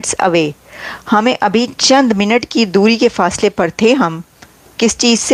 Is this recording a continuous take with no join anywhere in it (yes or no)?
yes